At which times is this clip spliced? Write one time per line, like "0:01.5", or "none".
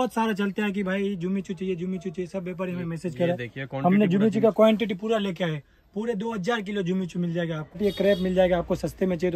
0:07.8